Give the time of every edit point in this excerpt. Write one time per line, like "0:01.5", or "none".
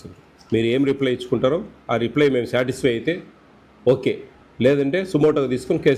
none